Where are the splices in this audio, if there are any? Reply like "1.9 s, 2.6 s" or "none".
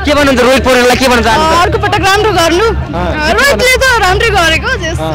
none